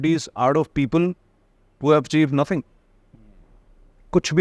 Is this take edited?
no; 0 cuts

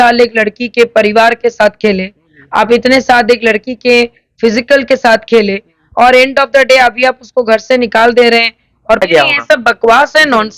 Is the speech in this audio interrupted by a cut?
yes; 1 cut; at 9.0 s

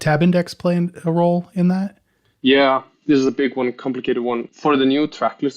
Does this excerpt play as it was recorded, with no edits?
no; 1 cut; at 4.5 s

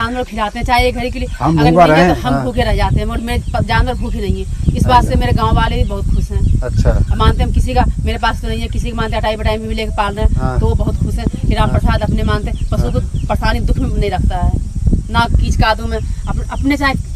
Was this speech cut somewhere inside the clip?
no; 0 cuts

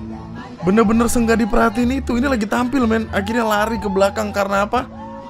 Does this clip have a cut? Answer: no; 0 cuts

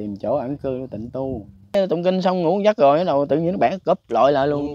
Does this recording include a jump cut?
yes; 1 cut; at 1.7 s

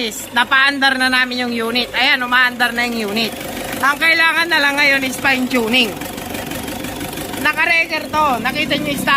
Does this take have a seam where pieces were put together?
no; 0 cuts

